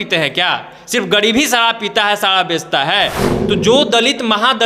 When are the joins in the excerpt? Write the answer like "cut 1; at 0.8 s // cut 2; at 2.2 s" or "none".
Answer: cut 1; at 3.3 s

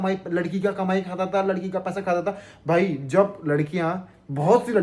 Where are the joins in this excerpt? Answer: none

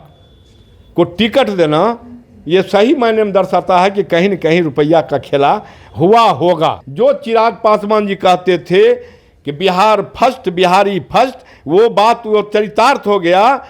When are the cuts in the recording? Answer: cut 1; at 6.8 s

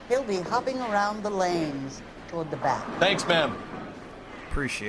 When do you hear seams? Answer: none

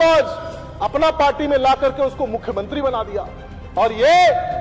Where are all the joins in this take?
none

